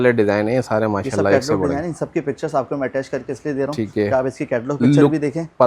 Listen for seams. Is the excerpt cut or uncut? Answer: uncut